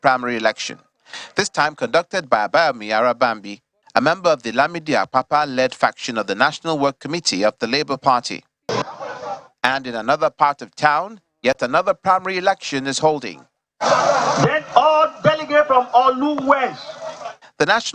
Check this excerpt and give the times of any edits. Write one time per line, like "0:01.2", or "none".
0:08.7